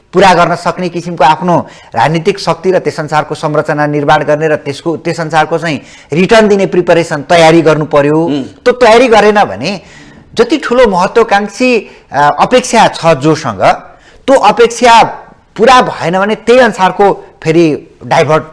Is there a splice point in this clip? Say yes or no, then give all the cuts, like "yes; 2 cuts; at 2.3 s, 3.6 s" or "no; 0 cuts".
no; 0 cuts